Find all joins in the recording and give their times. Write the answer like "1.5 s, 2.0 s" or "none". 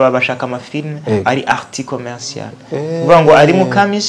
none